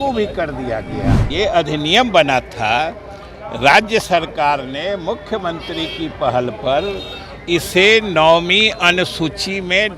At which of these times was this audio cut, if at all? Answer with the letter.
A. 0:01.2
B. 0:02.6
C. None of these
A